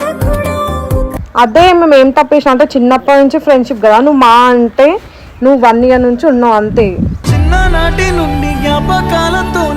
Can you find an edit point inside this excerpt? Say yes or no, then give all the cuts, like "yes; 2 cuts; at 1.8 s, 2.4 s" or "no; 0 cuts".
yes; 1 cut; at 1.2 s